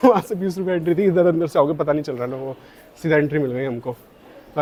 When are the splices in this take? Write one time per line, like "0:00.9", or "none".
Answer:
none